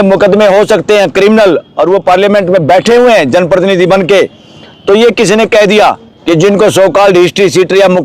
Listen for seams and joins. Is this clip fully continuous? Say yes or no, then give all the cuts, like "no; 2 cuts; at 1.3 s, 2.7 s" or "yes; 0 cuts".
no; 1 cut; at 6.1 s